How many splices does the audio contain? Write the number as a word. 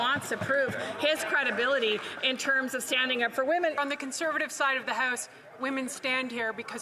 one